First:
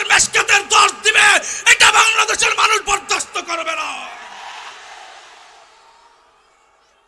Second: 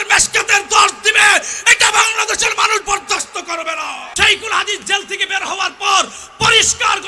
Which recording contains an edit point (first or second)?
second